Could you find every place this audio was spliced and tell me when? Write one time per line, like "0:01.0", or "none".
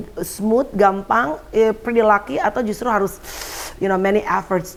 none